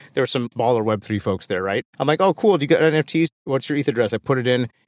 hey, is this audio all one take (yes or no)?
yes